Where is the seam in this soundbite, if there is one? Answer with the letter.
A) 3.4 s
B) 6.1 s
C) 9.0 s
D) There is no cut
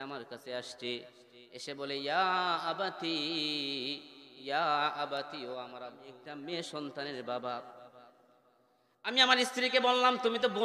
B